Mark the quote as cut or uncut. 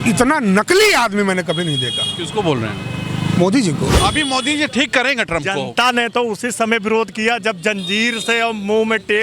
cut